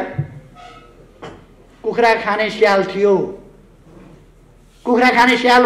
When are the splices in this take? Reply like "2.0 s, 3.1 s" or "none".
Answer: none